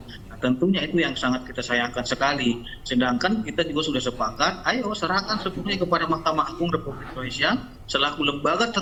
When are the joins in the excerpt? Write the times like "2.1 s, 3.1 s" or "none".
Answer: none